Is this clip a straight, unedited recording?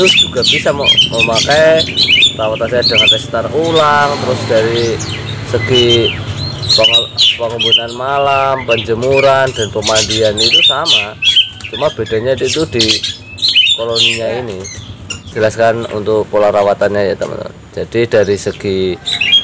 no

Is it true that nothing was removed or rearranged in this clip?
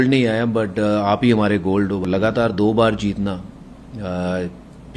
no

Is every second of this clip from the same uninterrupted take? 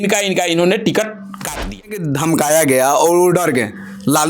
no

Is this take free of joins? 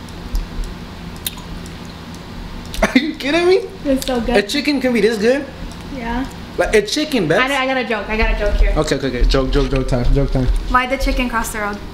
yes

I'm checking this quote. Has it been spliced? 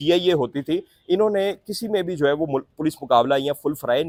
no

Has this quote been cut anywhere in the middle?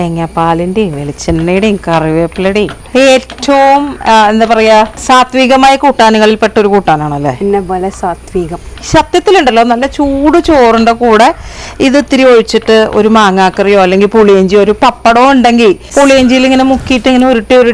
yes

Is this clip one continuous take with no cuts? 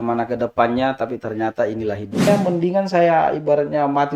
no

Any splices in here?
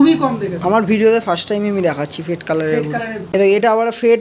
yes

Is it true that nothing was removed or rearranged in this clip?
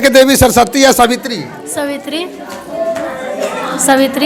yes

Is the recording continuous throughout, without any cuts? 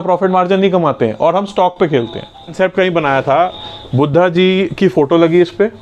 no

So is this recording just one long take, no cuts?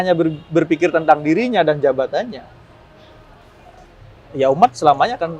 yes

